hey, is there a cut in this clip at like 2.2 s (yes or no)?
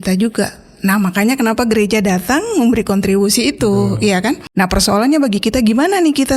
no